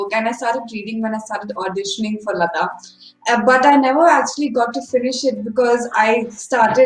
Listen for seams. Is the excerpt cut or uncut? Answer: uncut